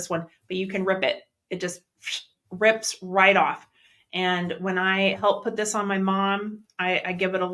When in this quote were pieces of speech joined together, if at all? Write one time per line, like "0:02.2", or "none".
none